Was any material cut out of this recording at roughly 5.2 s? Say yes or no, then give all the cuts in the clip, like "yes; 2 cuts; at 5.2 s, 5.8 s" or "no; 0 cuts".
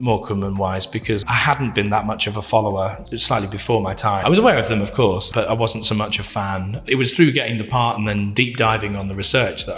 yes; 5 cuts; at 1.2 s, 3.0 s, 4.2 s, 5.2 s, 8.3 s